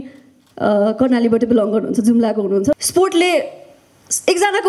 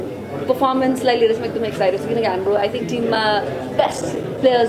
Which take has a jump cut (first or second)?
first